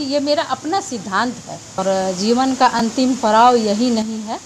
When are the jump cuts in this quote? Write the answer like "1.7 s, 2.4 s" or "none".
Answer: 1.8 s